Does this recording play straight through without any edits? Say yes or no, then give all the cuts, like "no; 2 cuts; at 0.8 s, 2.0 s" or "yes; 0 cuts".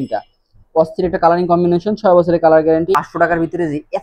no; 1 cut; at 3.0 s